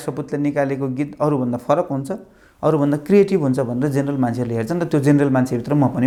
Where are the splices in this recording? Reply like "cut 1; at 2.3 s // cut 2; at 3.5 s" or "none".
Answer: none